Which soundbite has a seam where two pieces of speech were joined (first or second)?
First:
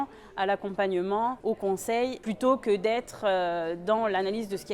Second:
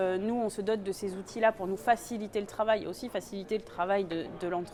first